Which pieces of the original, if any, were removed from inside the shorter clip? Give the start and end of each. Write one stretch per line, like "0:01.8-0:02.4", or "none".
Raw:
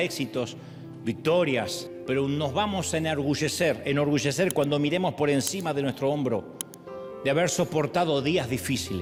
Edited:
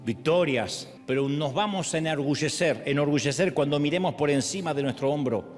none